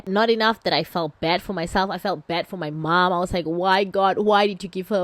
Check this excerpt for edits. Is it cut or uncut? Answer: uncut